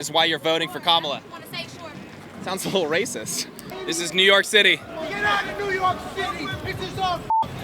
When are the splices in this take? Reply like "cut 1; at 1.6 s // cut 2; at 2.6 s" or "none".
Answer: cut 1; at 3.7 s